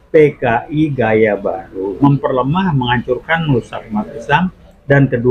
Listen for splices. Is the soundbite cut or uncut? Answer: cut